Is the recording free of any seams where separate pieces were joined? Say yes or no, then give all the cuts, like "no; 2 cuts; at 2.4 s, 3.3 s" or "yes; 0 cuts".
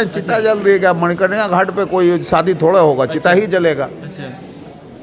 yes; 0 cuts